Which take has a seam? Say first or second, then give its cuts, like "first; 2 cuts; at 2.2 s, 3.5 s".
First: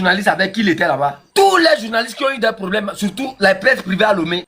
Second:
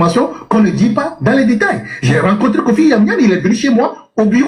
first; 1 cut; at 1.2 s